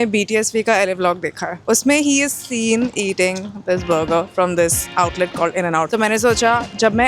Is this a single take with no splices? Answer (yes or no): no